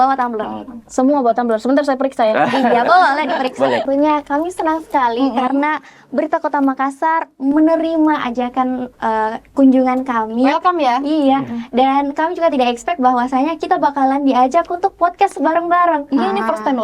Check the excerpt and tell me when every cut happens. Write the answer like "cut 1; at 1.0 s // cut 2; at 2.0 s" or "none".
cut 1; at 3.8 s